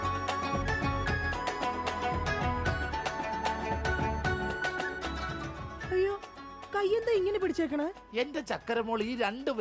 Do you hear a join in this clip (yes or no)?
yes